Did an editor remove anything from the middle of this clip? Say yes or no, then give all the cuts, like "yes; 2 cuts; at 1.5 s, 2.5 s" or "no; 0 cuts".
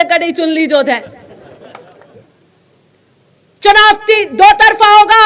yes; 1 cut; at 2.4 s